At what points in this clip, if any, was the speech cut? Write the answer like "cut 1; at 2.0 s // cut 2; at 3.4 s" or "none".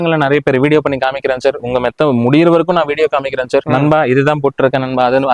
none